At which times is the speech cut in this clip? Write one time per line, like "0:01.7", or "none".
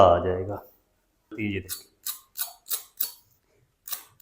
0:01.3